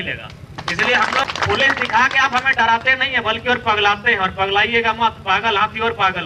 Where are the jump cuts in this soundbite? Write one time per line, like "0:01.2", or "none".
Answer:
0:01.3